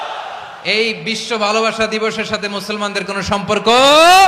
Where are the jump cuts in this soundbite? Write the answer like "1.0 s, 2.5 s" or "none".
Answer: none